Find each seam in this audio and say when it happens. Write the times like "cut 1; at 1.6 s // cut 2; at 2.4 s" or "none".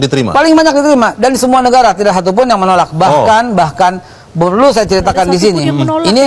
none